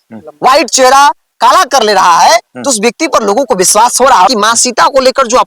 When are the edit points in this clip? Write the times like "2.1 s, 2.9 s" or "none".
4.3 s